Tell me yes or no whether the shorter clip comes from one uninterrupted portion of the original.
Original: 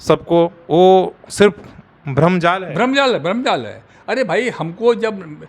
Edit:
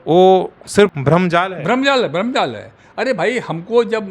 no